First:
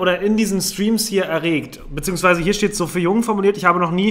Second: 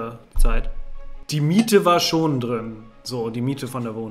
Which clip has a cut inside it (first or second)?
second